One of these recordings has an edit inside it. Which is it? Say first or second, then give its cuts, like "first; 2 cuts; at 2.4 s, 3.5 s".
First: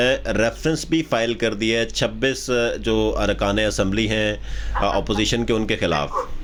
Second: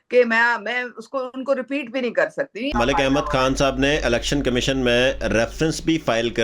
second; 1 cut; at 2.8 s